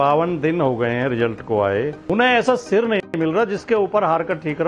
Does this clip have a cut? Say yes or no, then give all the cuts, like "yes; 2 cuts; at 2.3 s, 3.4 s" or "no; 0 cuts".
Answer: yes; 1 cut; at 2.0 s